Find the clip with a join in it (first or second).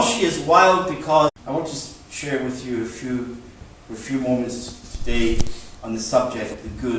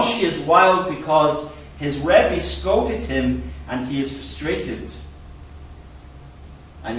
second